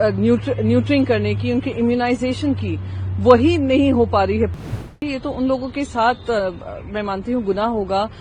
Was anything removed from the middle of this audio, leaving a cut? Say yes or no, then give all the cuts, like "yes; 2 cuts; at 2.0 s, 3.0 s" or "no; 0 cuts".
yes; 1 cut; at 4.8 s